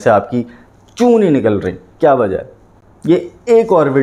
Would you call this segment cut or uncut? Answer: uncut